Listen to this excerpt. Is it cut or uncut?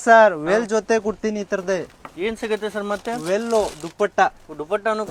uncut